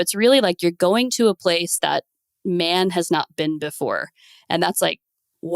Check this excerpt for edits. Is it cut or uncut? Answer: uncut